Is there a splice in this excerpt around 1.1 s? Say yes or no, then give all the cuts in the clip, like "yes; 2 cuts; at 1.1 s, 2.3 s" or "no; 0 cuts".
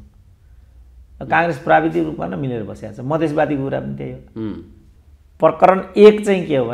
no; 1 cut; at 4.8 s